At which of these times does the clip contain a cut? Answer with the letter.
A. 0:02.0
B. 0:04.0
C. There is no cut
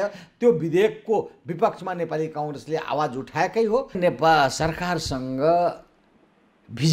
B